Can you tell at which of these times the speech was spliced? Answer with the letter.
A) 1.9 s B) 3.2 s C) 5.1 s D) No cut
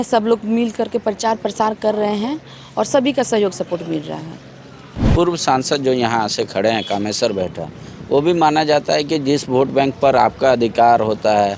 C